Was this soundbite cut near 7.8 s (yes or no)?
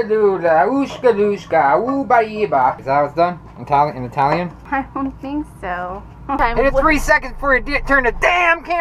no